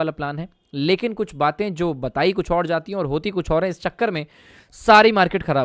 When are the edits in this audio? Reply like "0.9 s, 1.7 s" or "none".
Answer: none